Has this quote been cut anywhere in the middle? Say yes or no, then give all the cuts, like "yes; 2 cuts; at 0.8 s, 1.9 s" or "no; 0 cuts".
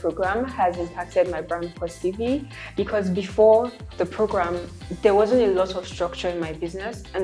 no; 0 cuts